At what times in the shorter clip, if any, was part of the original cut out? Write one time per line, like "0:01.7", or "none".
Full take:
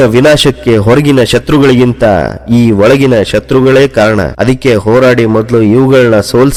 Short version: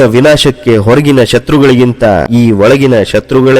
0:02.3

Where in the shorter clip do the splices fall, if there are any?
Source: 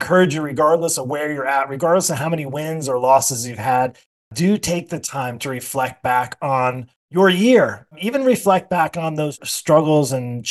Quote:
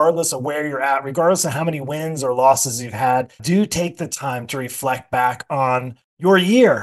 0:03.4

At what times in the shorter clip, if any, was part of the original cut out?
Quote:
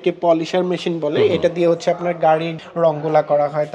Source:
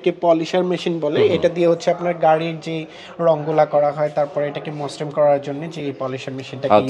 0:02.6

